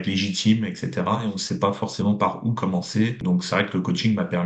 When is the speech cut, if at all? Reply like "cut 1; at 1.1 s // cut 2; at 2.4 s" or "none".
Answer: cut 1; at 1.2 s // cut 2; at 3.2 s